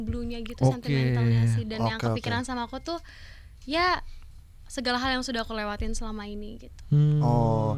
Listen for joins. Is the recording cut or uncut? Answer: uncut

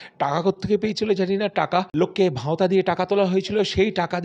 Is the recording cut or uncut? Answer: cut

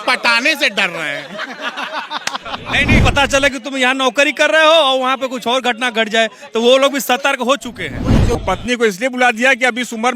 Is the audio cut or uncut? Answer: cut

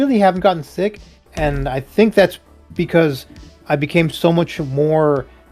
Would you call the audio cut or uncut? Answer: uncut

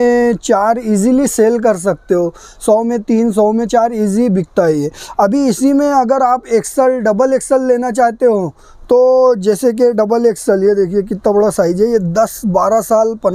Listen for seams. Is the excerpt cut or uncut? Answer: uncut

